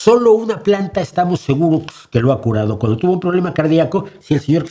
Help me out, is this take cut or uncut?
uncut